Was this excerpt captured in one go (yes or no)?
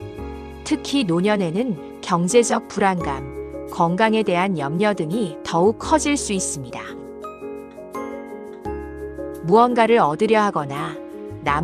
no